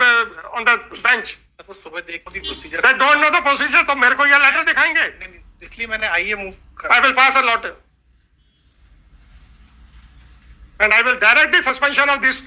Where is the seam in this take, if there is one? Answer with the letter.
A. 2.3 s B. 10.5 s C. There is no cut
A